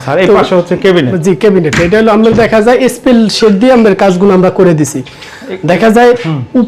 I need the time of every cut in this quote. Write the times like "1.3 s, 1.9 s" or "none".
none